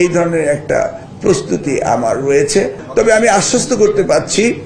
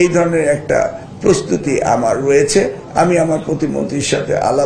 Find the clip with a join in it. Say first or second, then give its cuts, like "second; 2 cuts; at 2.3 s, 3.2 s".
first; 1 cut; at 2.8 s